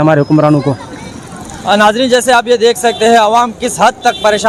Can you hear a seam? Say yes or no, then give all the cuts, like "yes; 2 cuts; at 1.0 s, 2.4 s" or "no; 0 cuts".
no; 0 cuts